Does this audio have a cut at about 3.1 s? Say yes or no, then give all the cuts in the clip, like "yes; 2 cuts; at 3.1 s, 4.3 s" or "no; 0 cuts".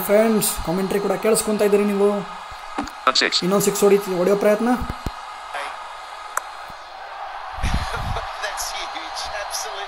yes; 1 cut; at 3.1 s